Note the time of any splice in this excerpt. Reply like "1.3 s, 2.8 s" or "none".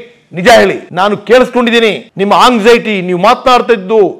0.9 s, 2.0 s